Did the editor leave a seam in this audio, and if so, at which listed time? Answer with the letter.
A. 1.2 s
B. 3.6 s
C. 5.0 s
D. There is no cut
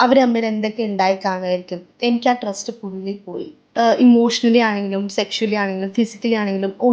B